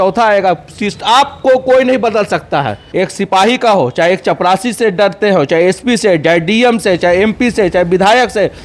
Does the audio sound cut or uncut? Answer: cut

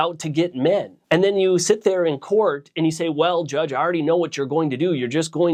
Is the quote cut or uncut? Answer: uncut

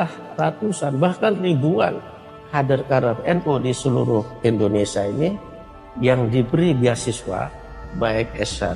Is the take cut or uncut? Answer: cut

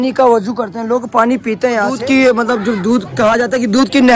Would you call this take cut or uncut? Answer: cut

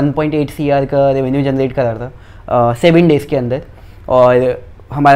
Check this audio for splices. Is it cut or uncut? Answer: uncut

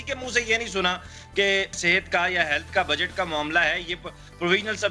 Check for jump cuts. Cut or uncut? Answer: cut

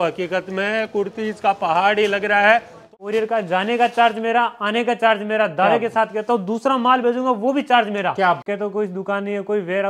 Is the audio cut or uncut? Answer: cut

